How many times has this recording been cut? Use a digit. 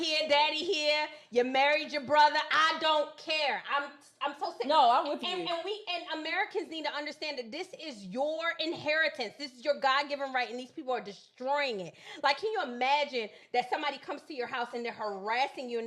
0